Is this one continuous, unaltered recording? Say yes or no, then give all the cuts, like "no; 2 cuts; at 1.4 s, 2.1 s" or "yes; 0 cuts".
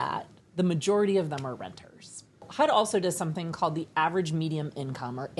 no; 1 cut; at 2.5 s